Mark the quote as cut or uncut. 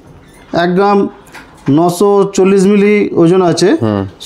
uncut